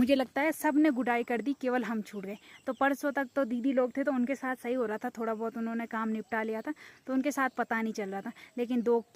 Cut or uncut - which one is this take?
uncut